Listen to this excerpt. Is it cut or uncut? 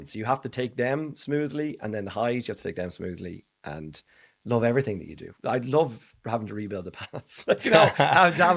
uncut